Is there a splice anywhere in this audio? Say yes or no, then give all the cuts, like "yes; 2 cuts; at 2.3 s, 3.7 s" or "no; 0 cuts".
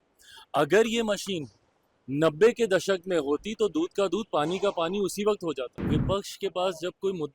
yes; 1 cut; at 5.7 s